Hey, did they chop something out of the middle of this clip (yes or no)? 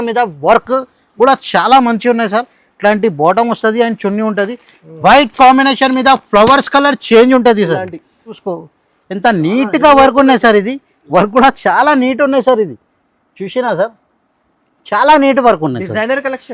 yes